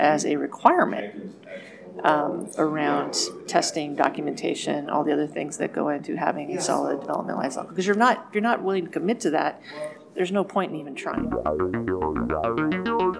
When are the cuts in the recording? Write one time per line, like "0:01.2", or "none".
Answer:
0:11.1